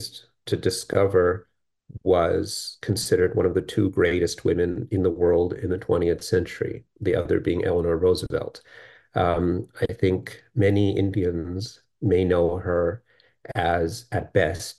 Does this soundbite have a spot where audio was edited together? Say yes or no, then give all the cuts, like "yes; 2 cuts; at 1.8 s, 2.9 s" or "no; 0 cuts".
no; 0 cuts